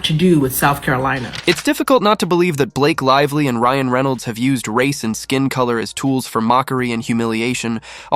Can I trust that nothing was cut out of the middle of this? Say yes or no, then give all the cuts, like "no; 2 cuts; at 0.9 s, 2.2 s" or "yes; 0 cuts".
no; 1 cut; at 1.4 s